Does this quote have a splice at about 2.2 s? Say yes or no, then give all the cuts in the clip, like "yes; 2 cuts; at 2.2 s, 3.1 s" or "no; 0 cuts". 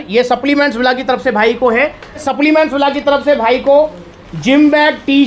yes; 1 cut; at 2.2 s